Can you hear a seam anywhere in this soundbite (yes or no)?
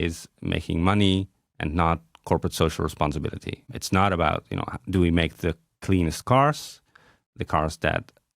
yes